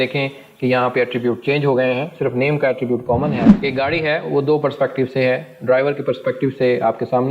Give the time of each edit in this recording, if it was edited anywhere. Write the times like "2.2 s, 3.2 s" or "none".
3.5 s